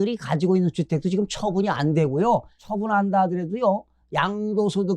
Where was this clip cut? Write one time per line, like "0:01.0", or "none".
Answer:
0:02.6